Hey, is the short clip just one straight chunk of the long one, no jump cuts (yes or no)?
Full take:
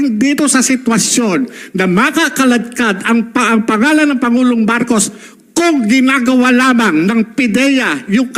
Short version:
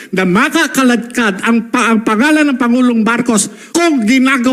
no